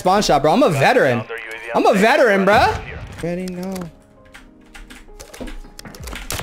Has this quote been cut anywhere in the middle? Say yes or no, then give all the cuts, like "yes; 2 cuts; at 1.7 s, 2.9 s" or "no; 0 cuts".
yes; 1 cut; at 3.2 s